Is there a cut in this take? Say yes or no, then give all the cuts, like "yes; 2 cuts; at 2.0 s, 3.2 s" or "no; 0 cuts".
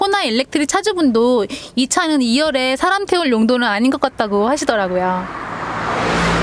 yes; 1 cut; at 5.4 s